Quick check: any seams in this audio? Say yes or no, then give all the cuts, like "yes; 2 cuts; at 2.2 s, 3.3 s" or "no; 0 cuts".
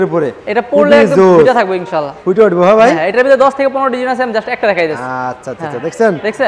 no; 0 cuts